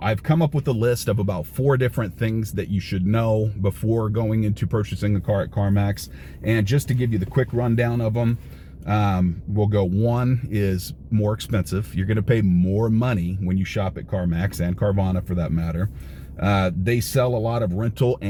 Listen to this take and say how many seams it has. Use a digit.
0